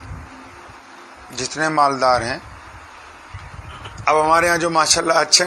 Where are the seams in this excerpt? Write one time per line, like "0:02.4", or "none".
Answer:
0:03.9